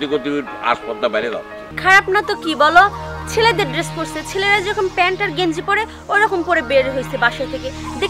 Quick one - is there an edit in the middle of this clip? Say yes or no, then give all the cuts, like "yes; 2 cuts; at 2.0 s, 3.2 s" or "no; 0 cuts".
yes; 1 cut; at 1.7 s